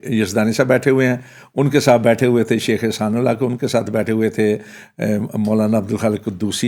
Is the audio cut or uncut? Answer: uncut